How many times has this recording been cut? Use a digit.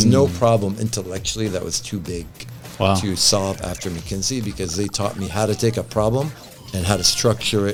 0